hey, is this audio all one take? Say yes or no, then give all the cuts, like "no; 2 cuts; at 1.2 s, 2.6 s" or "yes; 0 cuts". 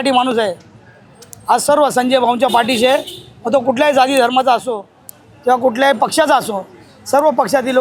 yes; 0 cuts